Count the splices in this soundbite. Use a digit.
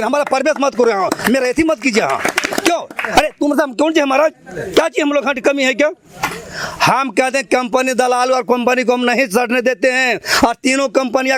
0